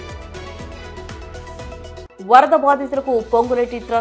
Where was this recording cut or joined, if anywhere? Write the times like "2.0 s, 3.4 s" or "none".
none

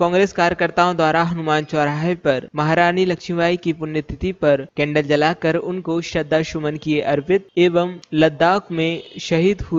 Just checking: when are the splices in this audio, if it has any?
none

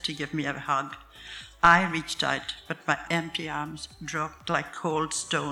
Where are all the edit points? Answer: 3.0 s

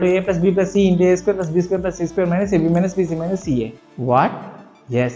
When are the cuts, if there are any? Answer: 3.8 s

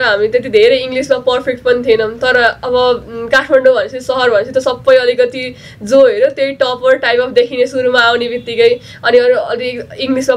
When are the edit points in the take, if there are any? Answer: none

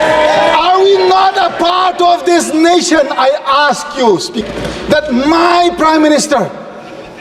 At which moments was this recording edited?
4.4 s

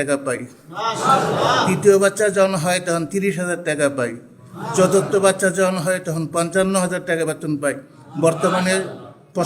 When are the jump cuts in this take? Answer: none

